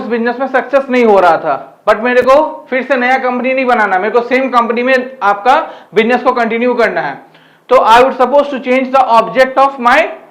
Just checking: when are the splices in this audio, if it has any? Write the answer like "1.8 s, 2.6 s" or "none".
none